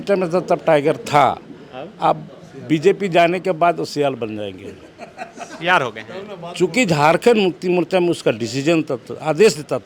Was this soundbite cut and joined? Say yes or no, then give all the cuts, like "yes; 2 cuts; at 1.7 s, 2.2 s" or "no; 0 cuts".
no; 0 cuts